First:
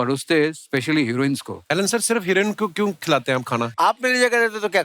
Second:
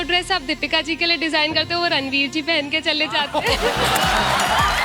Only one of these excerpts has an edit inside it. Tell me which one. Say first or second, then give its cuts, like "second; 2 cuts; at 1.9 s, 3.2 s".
first; 2 cuts; at 1.5 s, 3.7 s